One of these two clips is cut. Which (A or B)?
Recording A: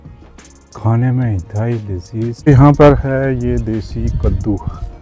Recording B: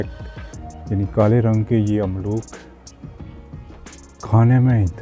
A